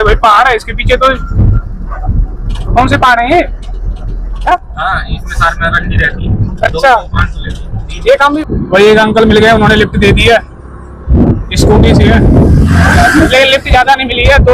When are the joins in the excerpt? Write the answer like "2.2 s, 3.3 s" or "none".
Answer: 4.5 s, 8.4 s